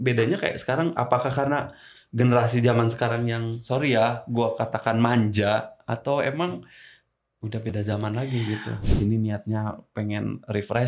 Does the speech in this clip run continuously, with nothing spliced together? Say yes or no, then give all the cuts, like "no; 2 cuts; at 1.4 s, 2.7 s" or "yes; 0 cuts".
no; 1 cut; at 8.8 s